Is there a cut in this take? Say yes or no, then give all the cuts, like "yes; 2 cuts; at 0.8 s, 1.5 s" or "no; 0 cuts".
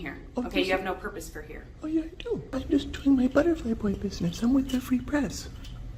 yes; 1 cut; at 2.6 s